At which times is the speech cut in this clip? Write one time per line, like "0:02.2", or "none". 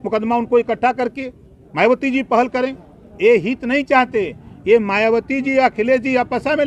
none